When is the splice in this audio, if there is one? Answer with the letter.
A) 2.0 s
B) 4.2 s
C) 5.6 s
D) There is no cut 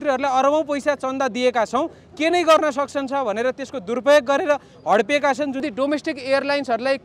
C